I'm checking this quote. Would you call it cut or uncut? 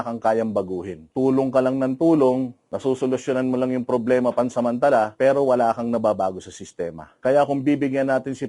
cut